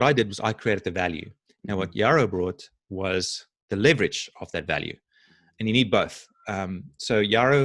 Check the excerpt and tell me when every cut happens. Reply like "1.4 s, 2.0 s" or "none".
none